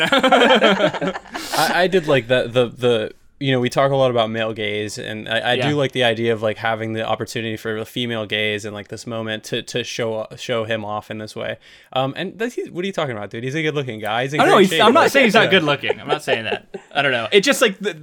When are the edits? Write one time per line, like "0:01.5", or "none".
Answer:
none

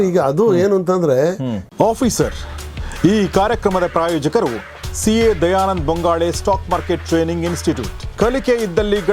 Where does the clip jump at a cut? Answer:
0:01.7

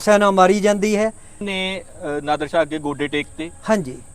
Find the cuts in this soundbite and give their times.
0:01.4

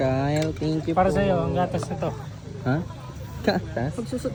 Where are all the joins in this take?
none

